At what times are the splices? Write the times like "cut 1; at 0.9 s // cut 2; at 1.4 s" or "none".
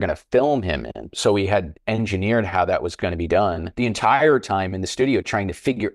cut 1; at 1.1 s // cut 2; at 3.7 s